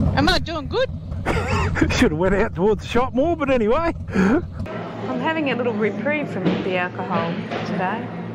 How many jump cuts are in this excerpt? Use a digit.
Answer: 1